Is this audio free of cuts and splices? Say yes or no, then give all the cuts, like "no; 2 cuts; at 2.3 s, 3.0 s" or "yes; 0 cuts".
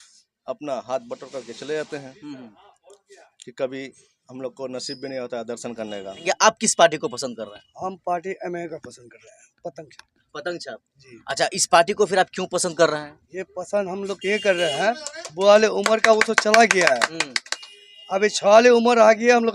no; 1 cut; at 6.2 s